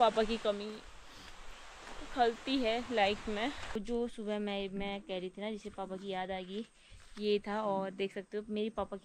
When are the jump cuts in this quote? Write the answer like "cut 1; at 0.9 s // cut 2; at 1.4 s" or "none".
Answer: cut 1; at 3.8 s